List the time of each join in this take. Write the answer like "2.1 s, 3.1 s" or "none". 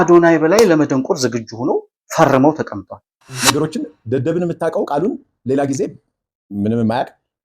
3.4 s